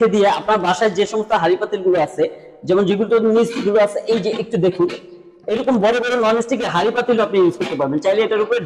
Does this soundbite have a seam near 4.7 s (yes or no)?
no